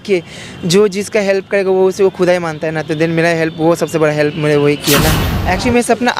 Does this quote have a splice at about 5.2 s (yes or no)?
yes